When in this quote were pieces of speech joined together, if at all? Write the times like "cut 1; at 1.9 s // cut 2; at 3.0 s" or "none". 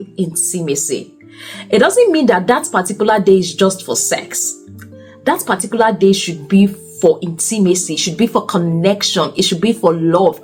none